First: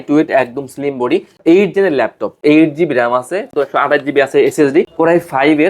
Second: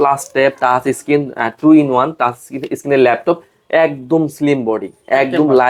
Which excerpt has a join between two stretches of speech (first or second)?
first